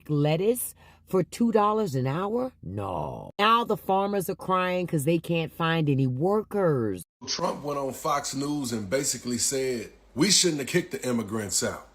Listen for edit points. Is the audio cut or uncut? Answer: cut